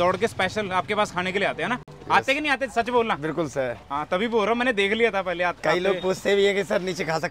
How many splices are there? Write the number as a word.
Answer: zero